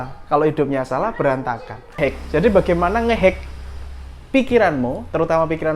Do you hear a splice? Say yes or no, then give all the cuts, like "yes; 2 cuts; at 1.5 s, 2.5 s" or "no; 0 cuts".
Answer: yes; 1 cut; at 2.0 s